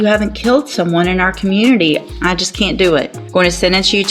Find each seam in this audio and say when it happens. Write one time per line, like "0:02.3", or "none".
0:02.1
0:03.2